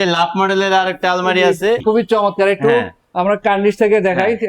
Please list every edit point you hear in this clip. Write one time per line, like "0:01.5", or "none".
0:01.8